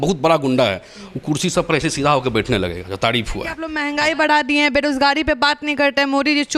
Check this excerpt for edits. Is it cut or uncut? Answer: cut